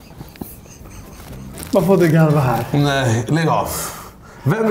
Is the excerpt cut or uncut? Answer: cut